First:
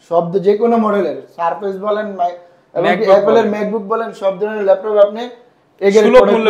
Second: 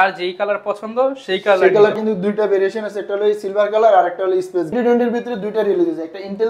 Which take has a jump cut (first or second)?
second